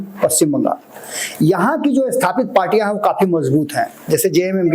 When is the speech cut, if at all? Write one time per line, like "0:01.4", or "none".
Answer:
none